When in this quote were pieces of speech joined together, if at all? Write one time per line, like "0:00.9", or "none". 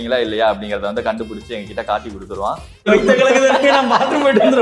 0:02.7